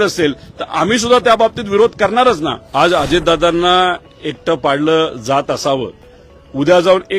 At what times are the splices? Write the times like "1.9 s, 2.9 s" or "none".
2.6 s